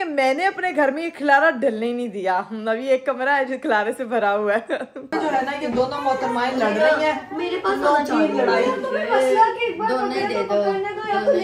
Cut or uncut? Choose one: cut